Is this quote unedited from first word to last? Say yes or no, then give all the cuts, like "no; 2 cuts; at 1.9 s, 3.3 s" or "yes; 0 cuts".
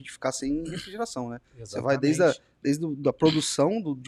yes; 0 cuts